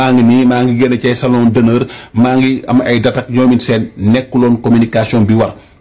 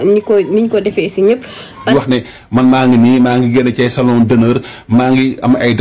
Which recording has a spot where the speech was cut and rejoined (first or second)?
second